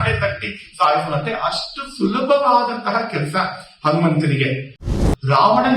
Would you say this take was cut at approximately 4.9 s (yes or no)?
yes